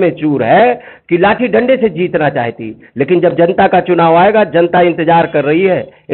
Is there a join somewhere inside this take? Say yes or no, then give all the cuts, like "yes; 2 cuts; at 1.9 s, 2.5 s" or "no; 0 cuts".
no; 0 cuts